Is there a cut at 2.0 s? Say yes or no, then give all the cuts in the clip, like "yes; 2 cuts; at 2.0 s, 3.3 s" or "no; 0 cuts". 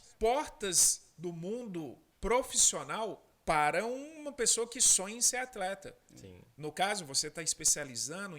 yes; 2 cuts; at 2.0 s, 3.3 s